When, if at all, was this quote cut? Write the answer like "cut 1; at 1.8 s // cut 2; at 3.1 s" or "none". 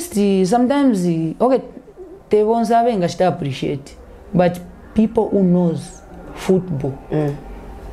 none